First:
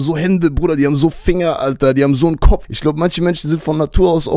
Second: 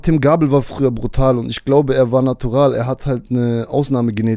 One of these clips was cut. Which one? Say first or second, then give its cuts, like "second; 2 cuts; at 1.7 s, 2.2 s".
first; 1 cut; at 2.7 s